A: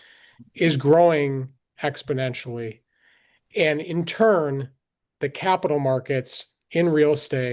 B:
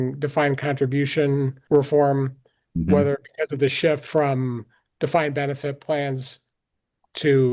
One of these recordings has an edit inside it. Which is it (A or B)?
B